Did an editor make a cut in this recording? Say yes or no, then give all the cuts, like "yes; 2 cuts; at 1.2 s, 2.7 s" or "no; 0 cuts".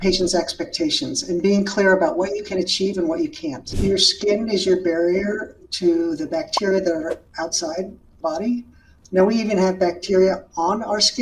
yes; 2 cuts; at 3.7 s, 8.2 s